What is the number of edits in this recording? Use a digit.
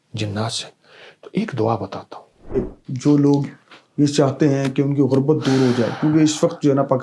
1